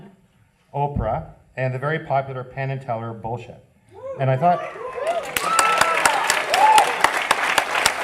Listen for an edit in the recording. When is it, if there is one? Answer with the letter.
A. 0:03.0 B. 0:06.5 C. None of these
A